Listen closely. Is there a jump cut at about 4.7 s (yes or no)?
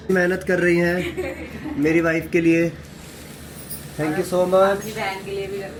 no